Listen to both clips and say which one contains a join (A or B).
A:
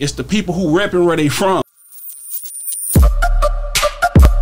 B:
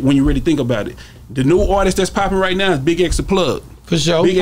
A